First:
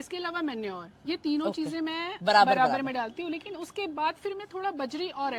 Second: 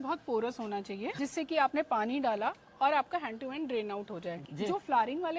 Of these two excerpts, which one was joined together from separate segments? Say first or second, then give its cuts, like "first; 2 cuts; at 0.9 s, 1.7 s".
second; 2 cuts; at 1.1 s, 4.4 s